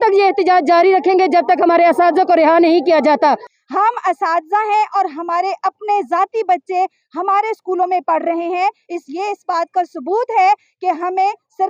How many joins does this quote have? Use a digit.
1